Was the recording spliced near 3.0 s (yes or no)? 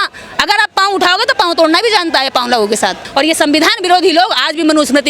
yes